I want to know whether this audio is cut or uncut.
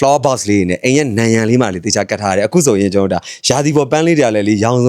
uncut